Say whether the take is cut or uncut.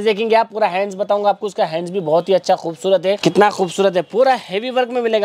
cut